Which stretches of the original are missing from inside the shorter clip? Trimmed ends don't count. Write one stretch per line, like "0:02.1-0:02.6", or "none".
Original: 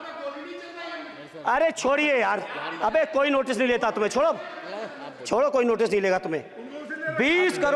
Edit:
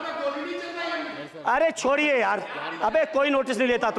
none